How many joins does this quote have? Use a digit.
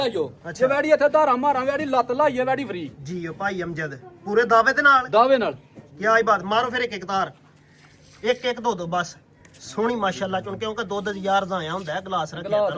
0